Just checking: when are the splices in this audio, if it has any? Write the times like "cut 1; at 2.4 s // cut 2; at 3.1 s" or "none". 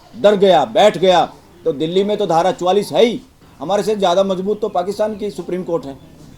cut 1; at 3.5 s